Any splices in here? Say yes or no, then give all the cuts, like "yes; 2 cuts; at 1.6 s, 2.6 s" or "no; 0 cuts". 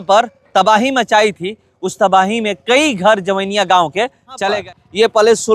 yes; 1 cut; at 4.7 s